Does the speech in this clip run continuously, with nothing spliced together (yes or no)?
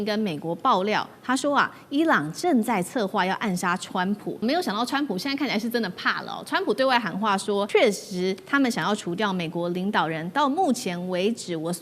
no